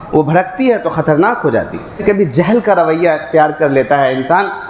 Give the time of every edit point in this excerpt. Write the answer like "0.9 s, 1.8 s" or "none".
2.0 s